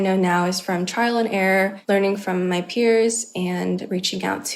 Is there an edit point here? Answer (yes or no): yes